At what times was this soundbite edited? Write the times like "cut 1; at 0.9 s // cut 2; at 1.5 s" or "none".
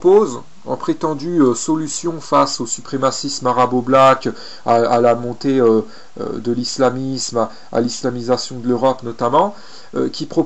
none